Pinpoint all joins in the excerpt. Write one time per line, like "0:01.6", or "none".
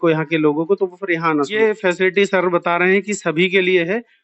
0:01.5